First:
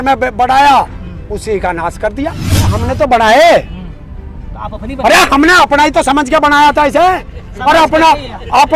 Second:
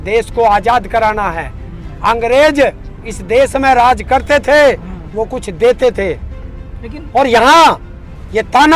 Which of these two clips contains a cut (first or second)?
first